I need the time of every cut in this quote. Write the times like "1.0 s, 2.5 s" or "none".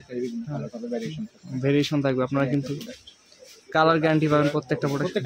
none